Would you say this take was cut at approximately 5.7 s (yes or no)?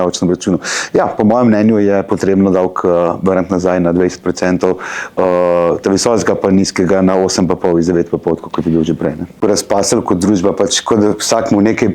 no